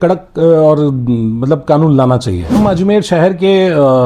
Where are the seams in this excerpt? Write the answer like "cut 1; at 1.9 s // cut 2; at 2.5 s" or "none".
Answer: cut 1; at 2.6 s